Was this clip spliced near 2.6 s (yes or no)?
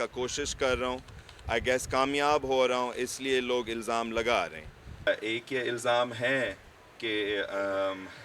no